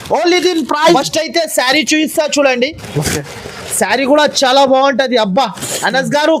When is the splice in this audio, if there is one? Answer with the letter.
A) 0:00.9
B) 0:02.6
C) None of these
A